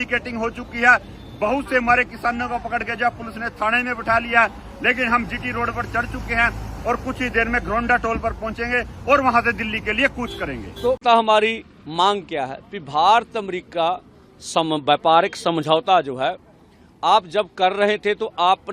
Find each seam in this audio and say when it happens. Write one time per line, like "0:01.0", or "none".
0:11.0